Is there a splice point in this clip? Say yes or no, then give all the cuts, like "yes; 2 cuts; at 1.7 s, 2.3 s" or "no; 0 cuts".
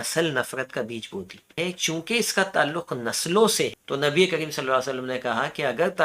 yes; 2 cuts; at 1.6 s, 3.8 s